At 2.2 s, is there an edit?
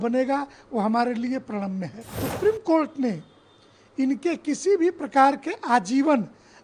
yes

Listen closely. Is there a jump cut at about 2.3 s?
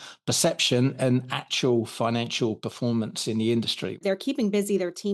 no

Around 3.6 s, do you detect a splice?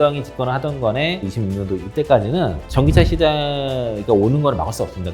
no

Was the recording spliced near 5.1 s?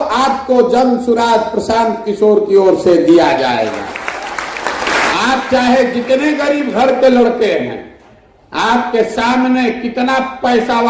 yes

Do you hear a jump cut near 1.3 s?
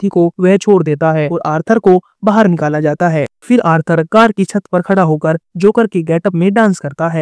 yes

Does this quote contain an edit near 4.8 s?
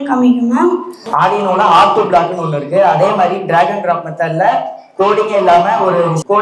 no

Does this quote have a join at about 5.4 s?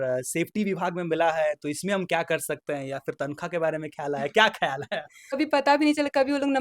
yes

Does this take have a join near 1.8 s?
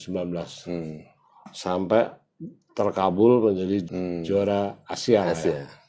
no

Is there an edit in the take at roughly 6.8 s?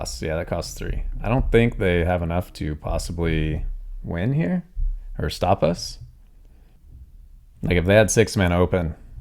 yes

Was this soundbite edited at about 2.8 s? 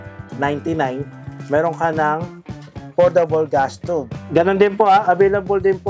no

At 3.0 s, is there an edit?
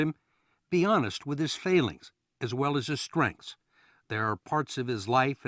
no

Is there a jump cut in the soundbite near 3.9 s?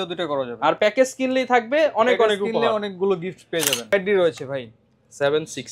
yes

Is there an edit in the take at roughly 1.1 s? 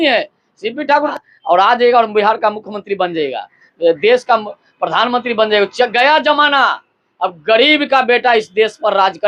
yes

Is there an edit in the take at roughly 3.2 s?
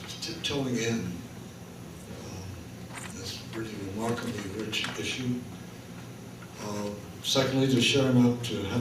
yes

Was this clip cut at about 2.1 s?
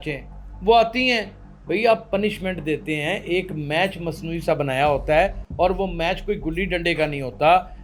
no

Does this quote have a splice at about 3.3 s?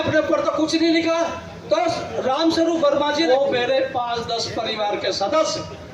yes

